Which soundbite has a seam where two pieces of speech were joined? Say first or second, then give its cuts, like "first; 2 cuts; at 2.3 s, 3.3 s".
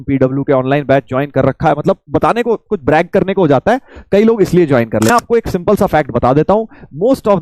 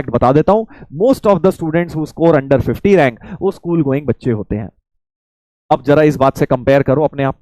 first; 1 cut; at 5.1 s